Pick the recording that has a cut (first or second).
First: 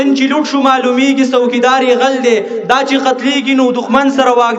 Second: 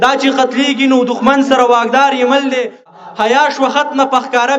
second